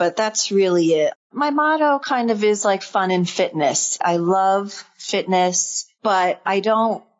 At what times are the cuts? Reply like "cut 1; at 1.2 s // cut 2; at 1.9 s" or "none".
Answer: cut 1; at 1.2 s // cut 2; at 4.0 s